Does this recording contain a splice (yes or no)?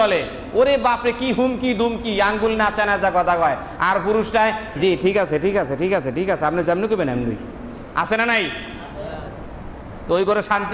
no